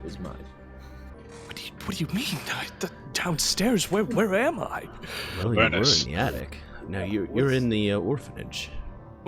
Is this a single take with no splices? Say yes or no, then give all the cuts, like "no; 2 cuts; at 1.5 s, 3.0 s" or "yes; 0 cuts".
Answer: no; 1 cut; at 1.1 s